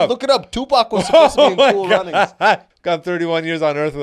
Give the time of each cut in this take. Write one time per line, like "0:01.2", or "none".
0:02.7